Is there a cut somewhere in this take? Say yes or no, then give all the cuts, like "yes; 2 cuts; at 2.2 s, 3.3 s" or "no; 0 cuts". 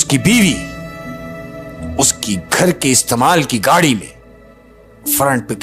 no; 0 cuts